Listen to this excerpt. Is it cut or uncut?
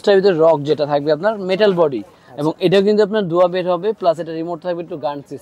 uncut